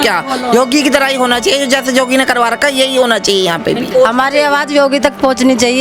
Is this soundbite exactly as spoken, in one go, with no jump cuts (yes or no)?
no